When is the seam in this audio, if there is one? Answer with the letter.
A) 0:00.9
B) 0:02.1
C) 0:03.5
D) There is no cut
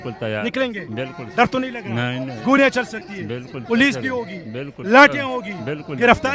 D